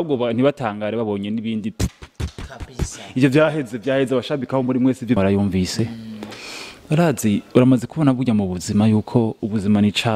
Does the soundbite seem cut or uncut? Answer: cut